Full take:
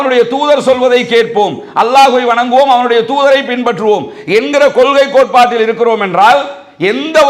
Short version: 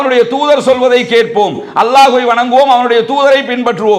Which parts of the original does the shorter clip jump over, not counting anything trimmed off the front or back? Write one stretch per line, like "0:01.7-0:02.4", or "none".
none